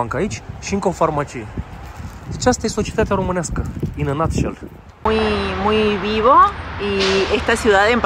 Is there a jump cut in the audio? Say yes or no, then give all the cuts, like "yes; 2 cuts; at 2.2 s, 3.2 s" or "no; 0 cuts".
yes; 1 cut; at 5.0 s